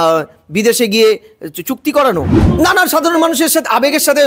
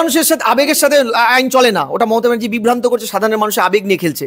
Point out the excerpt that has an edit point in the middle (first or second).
first